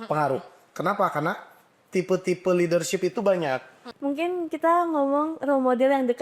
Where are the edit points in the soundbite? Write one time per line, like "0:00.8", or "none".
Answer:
0:03.8